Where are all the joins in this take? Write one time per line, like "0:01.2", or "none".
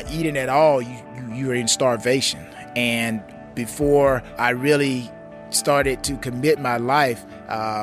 0:03.3
0:04.3